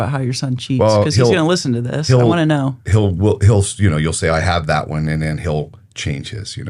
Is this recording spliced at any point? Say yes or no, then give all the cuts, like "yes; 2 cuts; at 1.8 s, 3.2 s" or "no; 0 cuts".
no; 0 cuts